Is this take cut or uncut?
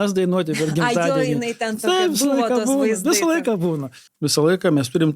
cut